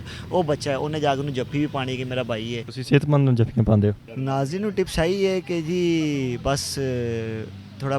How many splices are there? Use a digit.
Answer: 2